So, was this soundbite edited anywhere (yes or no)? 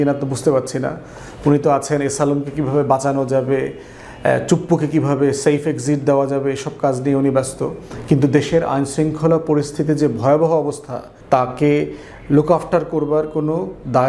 no